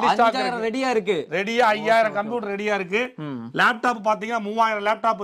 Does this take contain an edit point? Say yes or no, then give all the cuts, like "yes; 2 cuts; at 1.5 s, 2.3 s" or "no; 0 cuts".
no; 0 cuts